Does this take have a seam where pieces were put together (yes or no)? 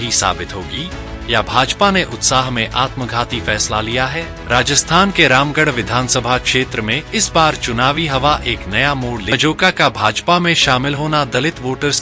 yes